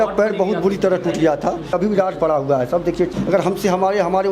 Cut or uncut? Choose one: cut